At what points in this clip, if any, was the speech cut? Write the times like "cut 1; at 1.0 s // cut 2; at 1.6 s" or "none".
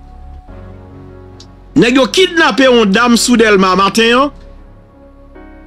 cut 1; at 1.7 s // cut 2; at 4.4 s